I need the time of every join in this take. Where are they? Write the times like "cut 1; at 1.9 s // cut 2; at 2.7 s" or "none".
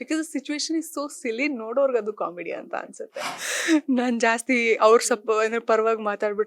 cut 1; at 3.4 s